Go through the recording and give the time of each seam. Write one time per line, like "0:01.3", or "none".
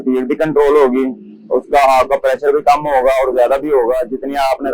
none